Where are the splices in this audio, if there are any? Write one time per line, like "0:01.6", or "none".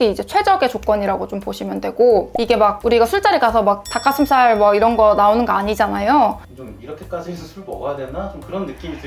0:02.3
0:06.4